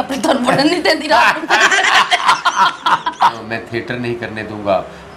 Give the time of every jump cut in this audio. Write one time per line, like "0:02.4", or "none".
0:03.4